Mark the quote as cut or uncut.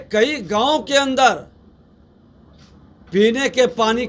uncut